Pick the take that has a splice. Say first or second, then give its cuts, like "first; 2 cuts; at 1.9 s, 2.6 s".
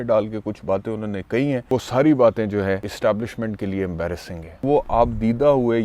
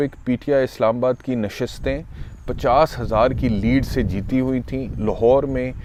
first; 3 cuts; at 1.7 s, 2.9 s, 4.6 s